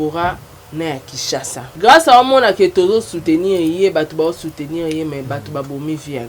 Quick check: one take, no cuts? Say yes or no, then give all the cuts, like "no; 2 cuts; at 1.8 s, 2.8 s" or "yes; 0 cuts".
no; 1 cut; at 1.7 s